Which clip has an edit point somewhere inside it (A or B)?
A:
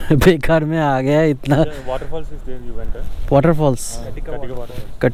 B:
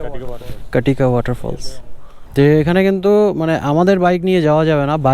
B